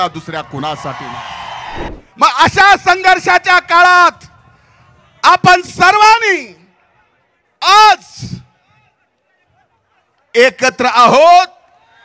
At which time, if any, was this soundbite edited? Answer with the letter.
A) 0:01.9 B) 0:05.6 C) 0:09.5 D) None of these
A